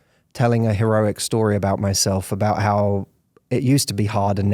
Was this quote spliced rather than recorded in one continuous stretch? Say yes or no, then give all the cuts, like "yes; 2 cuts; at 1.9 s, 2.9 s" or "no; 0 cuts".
no; 0 cuts